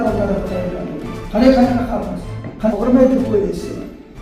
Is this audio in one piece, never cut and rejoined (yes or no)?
no